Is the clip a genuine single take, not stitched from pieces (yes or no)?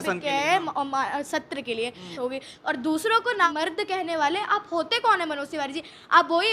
no